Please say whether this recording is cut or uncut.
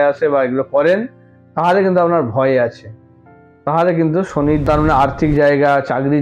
cut